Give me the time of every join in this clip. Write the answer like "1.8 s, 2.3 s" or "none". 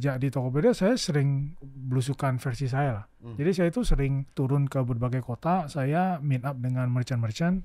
4.3 s